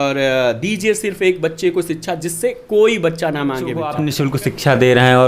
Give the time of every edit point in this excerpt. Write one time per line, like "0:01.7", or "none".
0:04.0